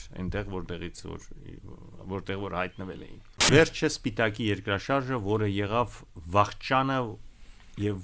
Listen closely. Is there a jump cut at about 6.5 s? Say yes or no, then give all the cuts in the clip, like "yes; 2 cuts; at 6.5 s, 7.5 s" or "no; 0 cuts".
no; 1 cut; at 3.5 s